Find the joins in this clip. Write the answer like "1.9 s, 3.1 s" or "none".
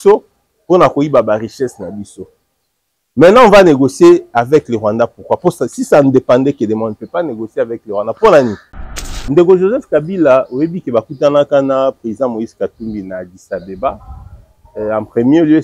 9.1 s

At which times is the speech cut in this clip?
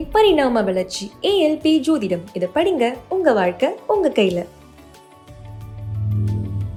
none

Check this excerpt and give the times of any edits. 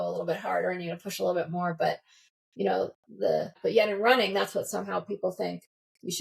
3.5 s

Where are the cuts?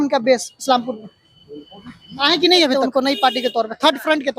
2.8 s

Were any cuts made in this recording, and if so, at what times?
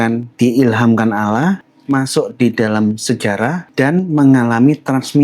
1.7 s, 3.6 s

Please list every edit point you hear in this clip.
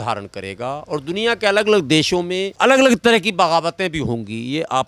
2.6 s

